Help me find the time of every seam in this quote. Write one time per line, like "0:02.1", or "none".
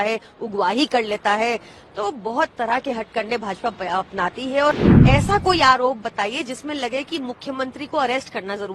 0:04.9